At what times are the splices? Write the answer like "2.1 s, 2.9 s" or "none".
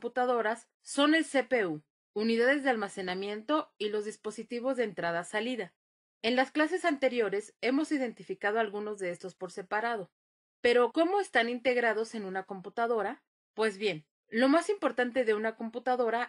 none